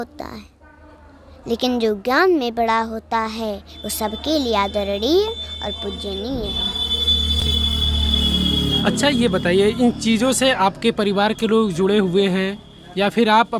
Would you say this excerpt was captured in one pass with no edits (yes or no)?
yes